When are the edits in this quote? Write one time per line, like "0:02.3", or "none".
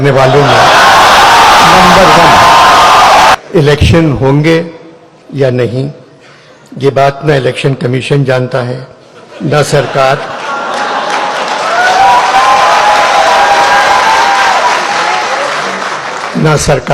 0:03.3